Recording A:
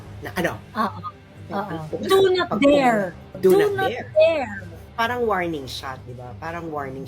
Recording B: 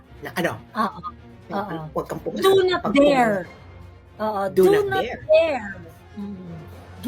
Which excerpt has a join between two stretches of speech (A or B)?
A